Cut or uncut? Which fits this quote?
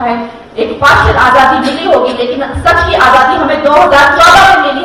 uncut